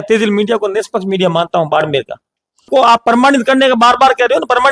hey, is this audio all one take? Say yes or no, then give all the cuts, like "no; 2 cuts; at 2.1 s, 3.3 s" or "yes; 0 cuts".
no; 1 cut; at 2.7 s